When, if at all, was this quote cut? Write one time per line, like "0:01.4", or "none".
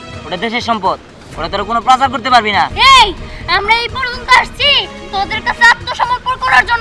0:02.7